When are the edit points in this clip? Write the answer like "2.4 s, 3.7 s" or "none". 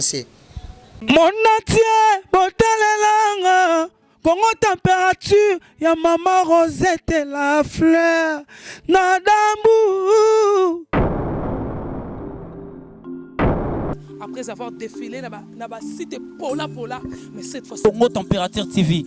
0.9 s